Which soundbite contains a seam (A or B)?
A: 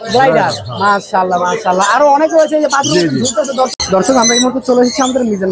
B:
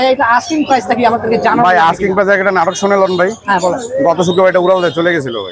A